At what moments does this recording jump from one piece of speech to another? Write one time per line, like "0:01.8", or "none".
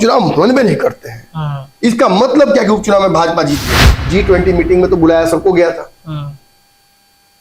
0:04.0

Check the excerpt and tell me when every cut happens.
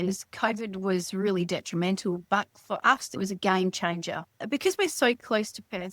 0:03.2
0:04.3

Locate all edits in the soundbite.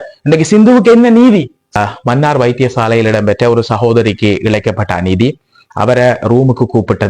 0:01.6

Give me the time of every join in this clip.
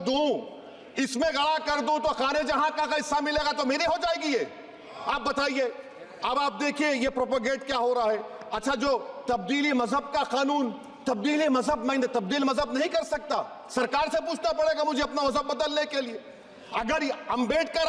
none

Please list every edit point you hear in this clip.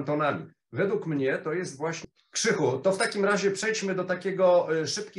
0:02.0

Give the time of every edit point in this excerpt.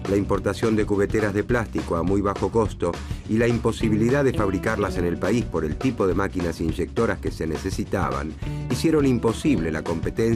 none

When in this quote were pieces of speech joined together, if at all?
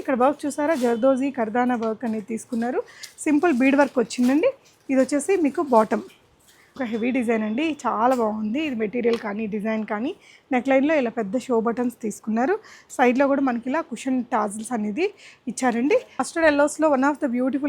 0:06.8
0:16.3

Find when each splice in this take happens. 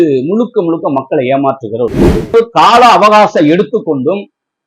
0:02.3

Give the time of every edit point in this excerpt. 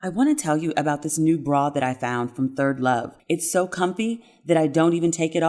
0:03.1

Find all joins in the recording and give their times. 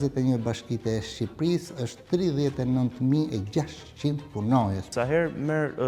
0:04.9

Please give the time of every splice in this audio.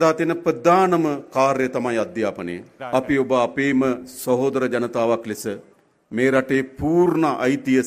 0:02.7

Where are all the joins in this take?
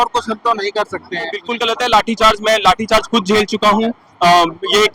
0:01.4

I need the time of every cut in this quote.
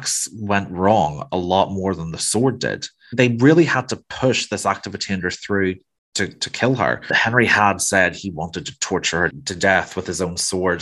0:03.1
0:07.1
0:09.4

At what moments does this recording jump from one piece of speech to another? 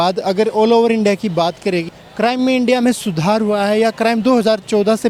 none

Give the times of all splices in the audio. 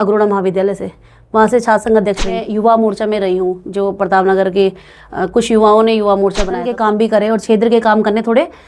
0:02.5
0:06.6

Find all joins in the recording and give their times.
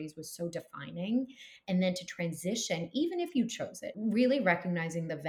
0:03.8

